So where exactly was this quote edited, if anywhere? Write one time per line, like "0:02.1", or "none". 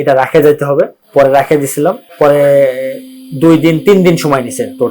0:01.0
0:02.1